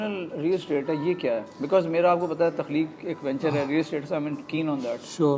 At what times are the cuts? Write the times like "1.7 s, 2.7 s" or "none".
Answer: none